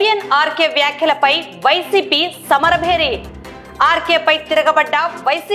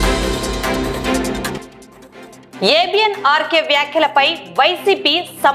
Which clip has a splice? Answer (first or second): second